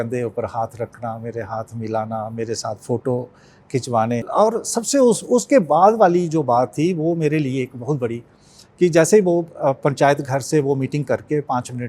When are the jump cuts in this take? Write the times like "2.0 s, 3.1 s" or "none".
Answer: 4.3 s